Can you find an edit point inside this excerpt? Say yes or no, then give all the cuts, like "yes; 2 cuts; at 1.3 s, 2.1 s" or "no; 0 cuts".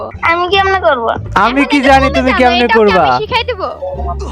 yes; 1 cut; at 1.2 s